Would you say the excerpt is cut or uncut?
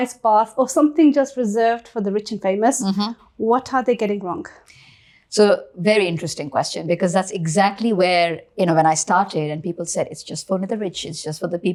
uncut